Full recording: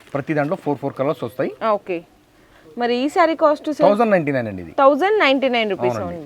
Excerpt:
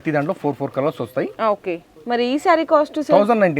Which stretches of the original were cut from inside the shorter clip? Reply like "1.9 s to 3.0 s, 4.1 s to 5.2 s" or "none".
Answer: 2.1 s to 2.6 s